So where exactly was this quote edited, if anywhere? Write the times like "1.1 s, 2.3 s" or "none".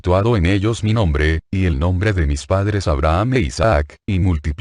none